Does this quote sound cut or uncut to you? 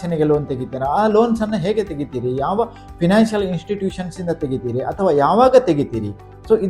uncut